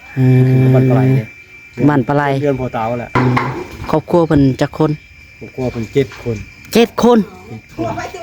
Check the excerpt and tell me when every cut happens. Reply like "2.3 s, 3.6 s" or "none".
3.1 s